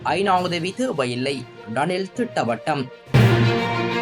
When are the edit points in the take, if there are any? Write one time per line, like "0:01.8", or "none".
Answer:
none